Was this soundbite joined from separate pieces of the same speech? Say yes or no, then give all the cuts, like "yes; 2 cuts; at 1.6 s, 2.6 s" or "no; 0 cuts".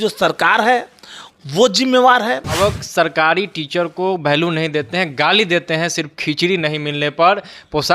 yes; 1 cut; at 2.6 s